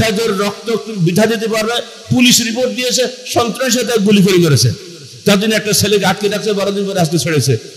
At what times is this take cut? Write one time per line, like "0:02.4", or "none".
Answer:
none